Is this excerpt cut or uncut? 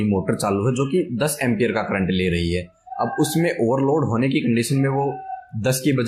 uncut